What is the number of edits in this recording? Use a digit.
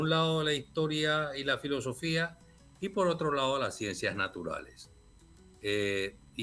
0